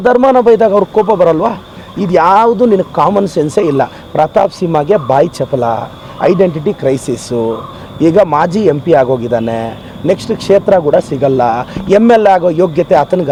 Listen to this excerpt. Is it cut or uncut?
uncut